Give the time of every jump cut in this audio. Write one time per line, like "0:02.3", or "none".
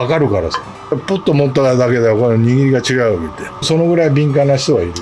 0:00.9
0:03.6